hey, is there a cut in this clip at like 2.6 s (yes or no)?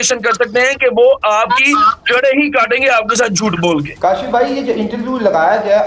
no